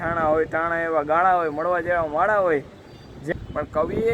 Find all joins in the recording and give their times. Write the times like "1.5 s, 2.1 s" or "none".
3.2 s